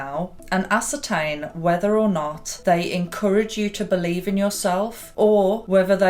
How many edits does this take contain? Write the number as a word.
one